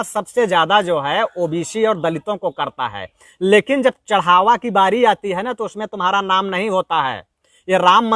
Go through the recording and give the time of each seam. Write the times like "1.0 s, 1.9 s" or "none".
none